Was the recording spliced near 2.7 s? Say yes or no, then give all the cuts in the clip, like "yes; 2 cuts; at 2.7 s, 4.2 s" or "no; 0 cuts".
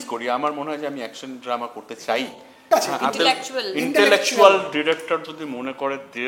yes; 1 cut; at 2.7 s